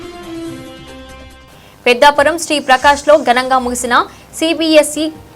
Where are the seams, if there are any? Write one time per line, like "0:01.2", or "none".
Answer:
none